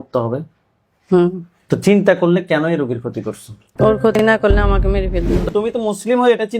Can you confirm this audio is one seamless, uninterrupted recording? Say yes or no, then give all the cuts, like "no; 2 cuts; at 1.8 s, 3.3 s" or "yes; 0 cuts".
no; 1 cut; at 5.5 s